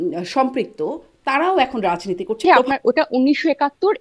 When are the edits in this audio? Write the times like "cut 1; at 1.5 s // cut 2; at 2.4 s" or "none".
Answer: cut 1; at 2.4 s